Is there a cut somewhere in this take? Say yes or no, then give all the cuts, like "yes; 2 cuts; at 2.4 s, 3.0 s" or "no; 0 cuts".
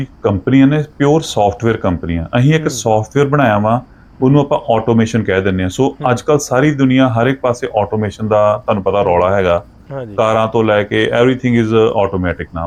no; 0 cuts